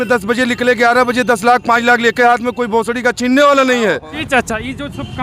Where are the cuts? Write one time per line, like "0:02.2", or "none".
0:04.1